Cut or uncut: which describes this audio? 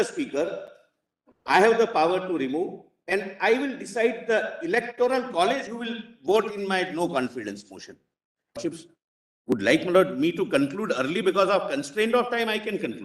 cut